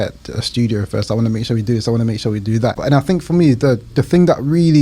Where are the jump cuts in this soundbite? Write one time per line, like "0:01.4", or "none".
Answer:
0:02.8

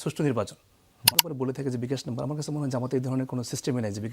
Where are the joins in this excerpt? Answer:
0:01.1

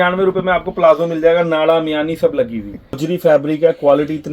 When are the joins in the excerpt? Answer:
0:02.9

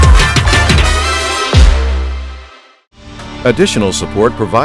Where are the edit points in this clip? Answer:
0:03.3

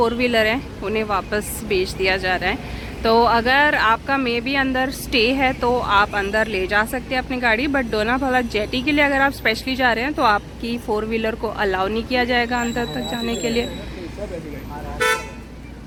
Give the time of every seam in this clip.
none

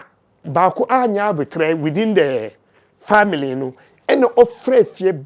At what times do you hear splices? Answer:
none

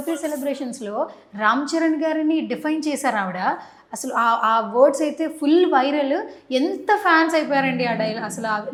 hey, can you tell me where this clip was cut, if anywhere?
none

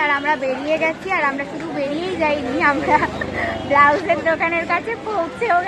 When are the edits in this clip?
none

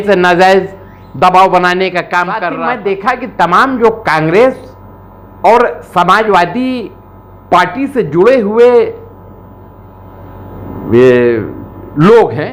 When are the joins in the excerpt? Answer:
0:02.5

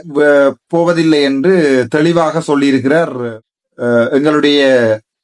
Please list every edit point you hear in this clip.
0:03.2

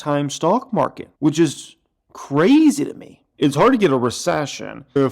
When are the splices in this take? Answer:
0:03.3

